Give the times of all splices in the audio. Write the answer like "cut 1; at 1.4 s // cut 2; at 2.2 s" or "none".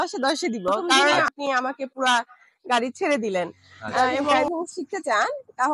cut 1; at 1.2 s // cut 2; at 4.4 s